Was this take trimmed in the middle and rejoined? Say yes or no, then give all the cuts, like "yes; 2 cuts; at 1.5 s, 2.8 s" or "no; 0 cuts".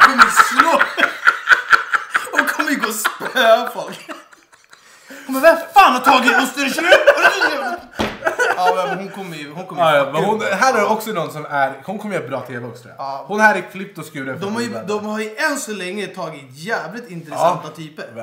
no; 0 cuts